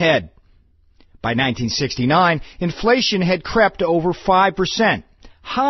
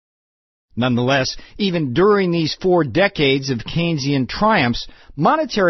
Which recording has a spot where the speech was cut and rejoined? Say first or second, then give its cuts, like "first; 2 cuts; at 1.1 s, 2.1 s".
second; 1 cut; at 3.1 s